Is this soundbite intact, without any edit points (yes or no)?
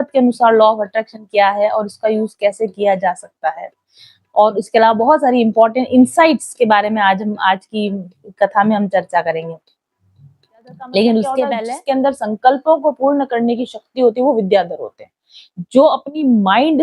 no